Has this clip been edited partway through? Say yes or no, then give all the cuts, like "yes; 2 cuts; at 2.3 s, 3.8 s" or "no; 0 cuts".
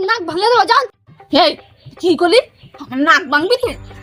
no; 0 cuts